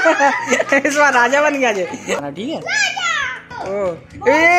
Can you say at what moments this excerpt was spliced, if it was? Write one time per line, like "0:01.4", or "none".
0:02.2
0:03.5